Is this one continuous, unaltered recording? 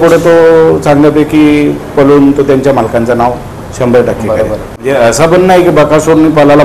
no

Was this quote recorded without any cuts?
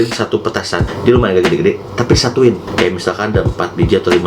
no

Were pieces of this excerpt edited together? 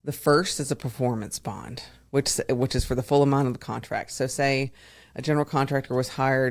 no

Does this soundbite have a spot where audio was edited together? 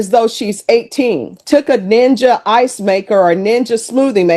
yes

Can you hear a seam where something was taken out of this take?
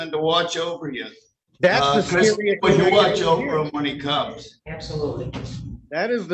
no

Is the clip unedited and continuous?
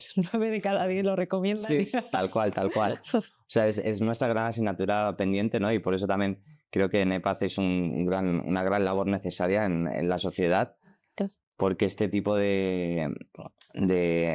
yes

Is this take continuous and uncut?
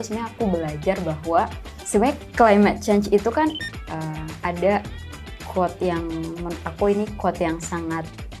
no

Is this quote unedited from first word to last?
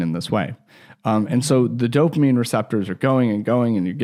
yes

